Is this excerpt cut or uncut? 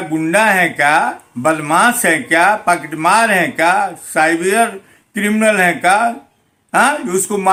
uncut